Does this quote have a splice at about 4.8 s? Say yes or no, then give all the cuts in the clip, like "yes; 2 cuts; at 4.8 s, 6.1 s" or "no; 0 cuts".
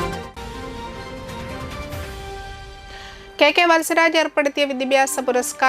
no; 0 cuts